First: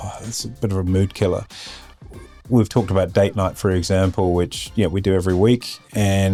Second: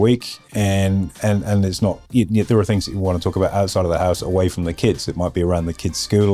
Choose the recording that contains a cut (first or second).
second